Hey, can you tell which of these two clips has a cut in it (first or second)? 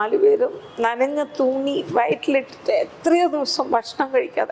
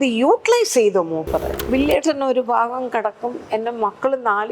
second